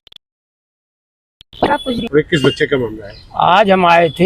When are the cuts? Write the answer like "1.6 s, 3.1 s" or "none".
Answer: 2.0 s